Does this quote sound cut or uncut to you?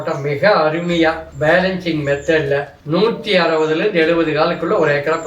cut